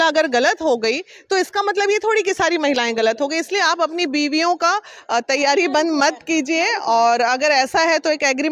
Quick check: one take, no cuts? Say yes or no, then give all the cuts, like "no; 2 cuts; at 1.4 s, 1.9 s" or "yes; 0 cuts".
yes; 0 cuts